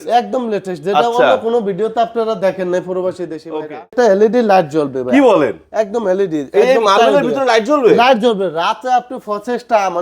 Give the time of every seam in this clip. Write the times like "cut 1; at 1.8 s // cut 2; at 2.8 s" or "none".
cut 1; at 3.9 s